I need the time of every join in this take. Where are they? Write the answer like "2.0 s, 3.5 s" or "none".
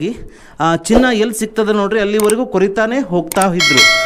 none